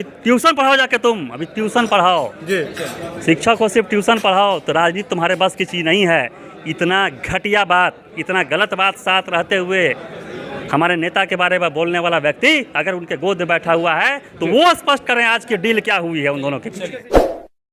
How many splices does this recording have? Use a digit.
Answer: 0